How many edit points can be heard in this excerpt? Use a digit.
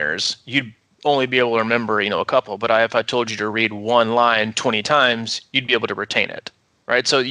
0